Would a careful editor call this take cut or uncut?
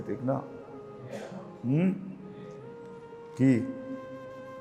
uncut